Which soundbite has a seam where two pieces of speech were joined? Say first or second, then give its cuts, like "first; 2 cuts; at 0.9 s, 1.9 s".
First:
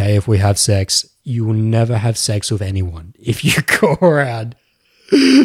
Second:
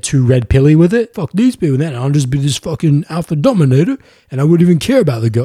second; 1 cut; at 1.2 s